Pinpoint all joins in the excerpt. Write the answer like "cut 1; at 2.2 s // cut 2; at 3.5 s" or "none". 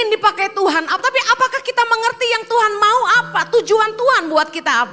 none

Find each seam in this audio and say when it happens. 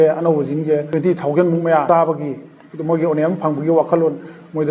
cut 1; at 0.9 s // cut 2; at 1.8 s

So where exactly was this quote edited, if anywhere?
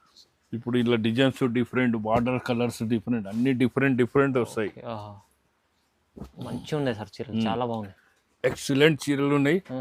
none

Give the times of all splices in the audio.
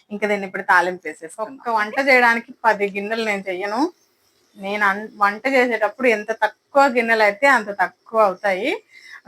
cut 1; at 1.5 s

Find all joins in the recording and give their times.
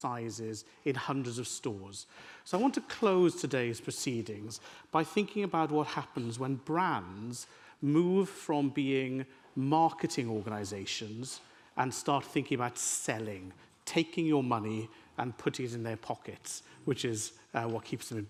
none

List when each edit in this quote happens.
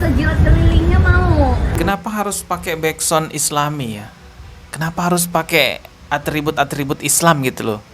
cut 1; at 1.8 s

